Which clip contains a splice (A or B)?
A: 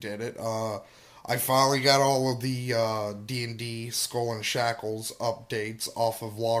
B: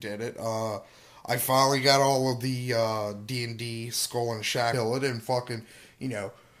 A